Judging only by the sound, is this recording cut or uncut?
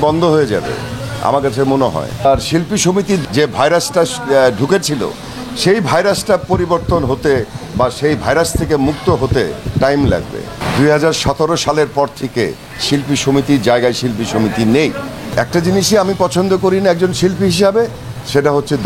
cut